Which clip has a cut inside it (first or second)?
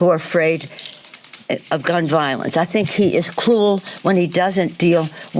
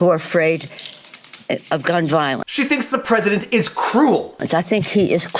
first